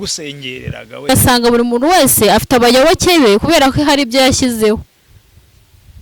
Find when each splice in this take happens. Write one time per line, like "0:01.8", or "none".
0:01.1